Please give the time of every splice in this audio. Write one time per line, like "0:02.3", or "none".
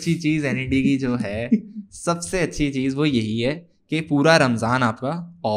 none